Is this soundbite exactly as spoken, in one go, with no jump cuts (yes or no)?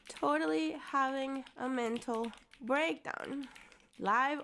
no